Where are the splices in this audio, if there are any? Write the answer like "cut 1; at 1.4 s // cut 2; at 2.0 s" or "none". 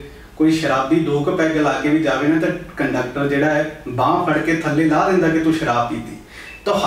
none